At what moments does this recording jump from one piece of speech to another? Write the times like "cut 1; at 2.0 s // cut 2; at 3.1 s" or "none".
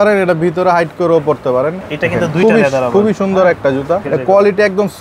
cut 1; at 1.9 s // cut 2; at 4.1 s